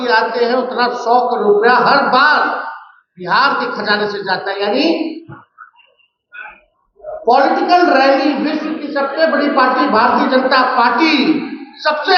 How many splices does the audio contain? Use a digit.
0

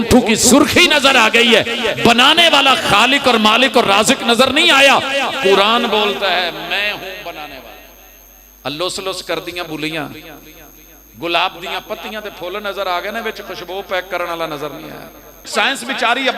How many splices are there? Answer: 1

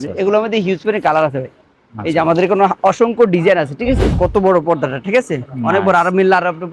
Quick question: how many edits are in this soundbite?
1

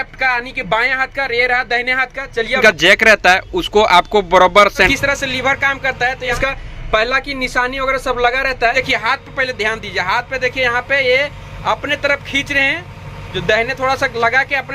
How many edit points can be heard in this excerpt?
4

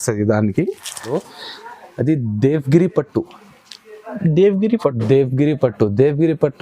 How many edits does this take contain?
1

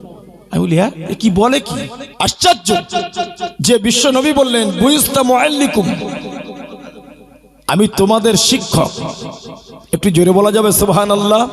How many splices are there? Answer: 2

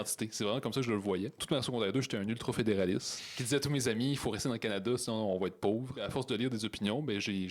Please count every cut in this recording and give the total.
2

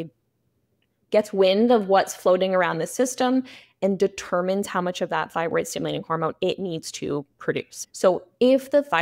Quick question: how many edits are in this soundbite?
1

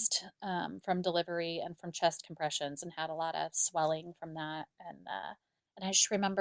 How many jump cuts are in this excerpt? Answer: 1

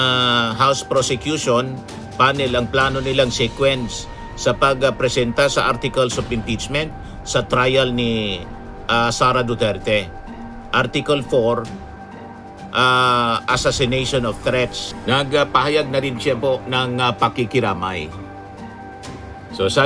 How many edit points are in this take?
1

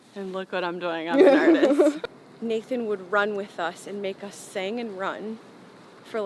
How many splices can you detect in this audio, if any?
1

